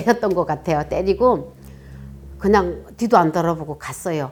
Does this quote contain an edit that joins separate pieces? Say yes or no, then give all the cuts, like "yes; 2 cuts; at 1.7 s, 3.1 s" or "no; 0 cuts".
no; 0 cuts